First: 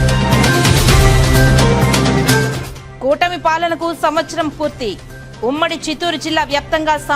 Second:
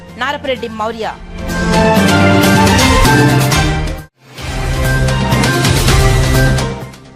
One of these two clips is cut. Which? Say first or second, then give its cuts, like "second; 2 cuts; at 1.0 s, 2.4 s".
first; 1 cut; at 1.5 s